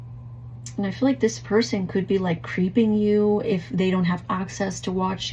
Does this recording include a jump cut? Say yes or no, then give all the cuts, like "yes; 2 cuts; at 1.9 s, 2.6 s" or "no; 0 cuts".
no; 0 cuts